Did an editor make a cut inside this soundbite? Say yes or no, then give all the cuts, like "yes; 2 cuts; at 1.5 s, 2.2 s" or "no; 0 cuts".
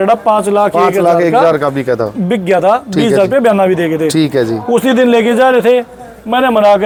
no; 0 cuts